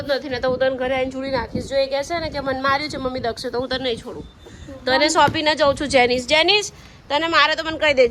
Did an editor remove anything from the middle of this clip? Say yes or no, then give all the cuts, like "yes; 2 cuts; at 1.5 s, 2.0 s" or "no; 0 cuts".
no; 0 cuts